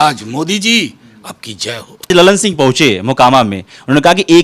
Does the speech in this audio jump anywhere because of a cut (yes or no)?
yes